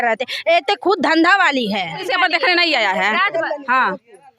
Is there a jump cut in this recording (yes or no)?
yes